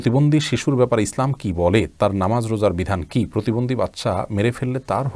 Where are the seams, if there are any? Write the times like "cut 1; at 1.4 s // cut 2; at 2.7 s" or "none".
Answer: none

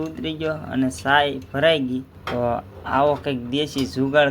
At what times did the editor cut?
cut 1; at 2.2 s

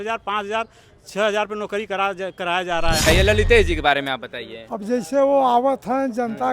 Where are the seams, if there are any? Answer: cut 1; at 3.1 s

